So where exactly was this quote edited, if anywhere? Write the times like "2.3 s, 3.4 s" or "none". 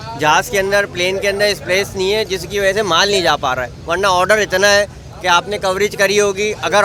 none